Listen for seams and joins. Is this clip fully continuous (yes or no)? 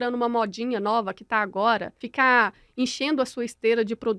no